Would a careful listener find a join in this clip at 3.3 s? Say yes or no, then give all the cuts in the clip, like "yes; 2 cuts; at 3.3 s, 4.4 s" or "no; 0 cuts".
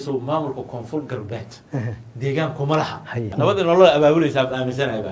yes; 1 cut; at 3.3 s